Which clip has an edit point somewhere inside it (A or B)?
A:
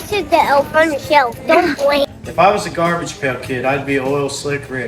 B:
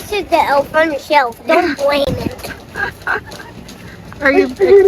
A